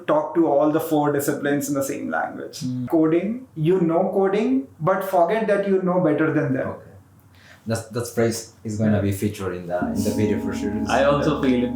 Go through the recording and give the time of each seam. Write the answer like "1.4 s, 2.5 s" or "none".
2.8 s